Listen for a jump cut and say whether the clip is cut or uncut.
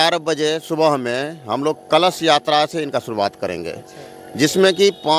uncut